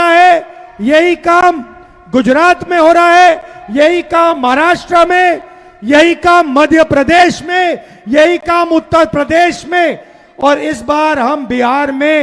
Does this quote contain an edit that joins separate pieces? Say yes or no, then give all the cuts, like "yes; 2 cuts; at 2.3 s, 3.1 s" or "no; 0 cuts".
no; 0 cuts